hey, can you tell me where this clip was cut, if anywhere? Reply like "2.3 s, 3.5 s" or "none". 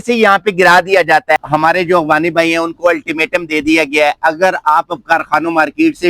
1.4 s